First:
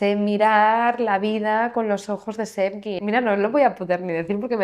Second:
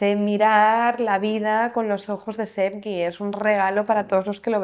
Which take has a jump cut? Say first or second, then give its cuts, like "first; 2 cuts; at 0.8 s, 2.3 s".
first; 1 cut; at 3.0 s